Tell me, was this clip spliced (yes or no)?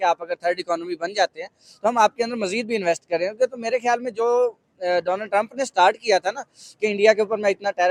no